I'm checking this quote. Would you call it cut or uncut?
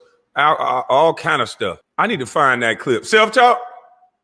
cut